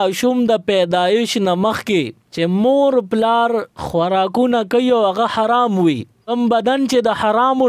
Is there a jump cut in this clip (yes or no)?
yes